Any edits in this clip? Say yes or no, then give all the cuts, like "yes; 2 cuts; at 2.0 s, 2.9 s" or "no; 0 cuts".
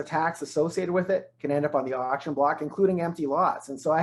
no; 0 cuts